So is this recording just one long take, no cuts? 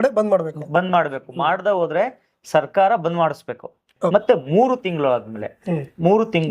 no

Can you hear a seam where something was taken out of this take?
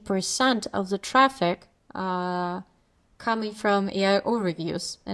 no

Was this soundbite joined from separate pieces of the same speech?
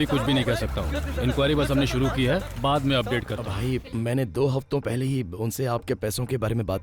yes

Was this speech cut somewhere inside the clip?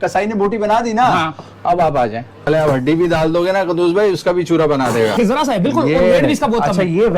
yes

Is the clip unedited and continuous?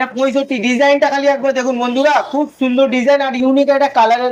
yes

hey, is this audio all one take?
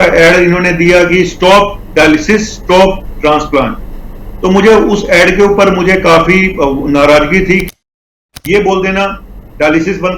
no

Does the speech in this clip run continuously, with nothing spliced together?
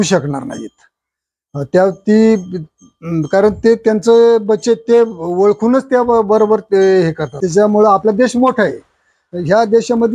no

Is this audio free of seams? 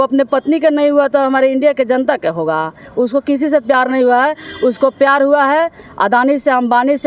yes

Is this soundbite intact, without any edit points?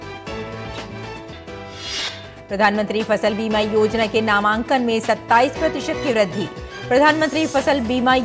no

